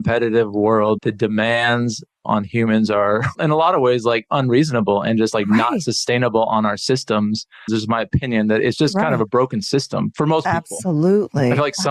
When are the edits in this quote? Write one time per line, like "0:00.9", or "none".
0:01.0
0:02.2
0:03.3
0:07.7